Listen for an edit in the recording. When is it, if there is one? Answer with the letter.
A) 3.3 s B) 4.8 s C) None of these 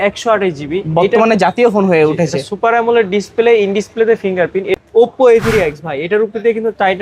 B